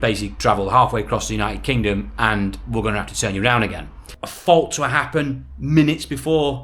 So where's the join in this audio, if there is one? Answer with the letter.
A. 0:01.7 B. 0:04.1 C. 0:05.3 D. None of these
B